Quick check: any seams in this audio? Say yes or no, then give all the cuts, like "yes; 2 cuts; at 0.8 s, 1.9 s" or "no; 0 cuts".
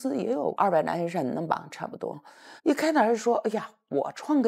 yes; 1 cut; at 2.4 s